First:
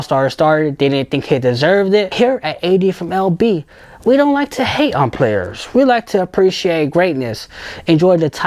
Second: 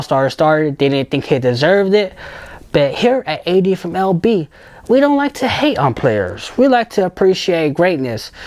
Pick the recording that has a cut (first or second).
first